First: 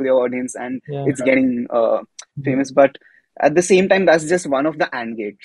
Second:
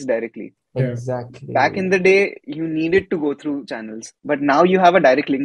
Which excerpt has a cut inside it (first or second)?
second